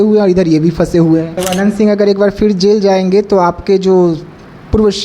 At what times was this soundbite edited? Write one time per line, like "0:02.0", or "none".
0:01.4

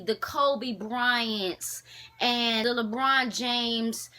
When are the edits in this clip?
0:02.6

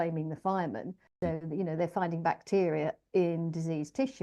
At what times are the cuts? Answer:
0:01.0

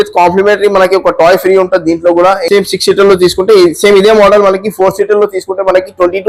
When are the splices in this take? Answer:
none

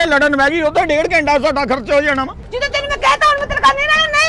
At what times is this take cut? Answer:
0:02.3

